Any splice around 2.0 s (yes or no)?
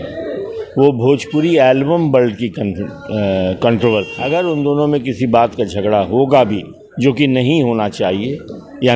no